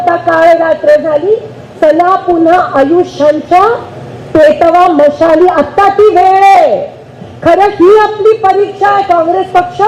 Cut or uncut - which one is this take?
uncut